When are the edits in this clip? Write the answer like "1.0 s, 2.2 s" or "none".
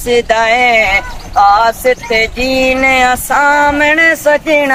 none